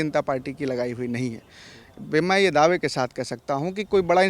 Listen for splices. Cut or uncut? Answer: uncut